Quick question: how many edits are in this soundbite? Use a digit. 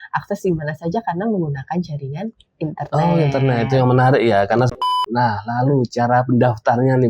1